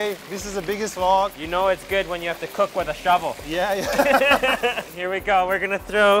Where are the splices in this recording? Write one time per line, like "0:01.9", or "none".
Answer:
0:01.4
0:04.9